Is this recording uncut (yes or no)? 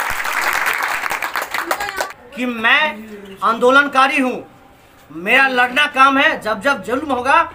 no